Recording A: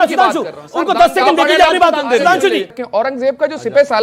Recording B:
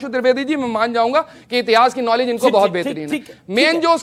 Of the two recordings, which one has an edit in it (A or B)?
A